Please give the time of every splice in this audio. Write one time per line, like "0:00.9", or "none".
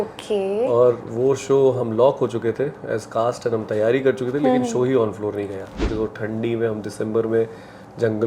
0:05.8